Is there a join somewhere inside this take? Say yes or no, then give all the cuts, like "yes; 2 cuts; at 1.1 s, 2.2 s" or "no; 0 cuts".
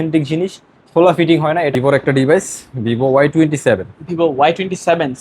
yes; 1 cut; at 1.7 s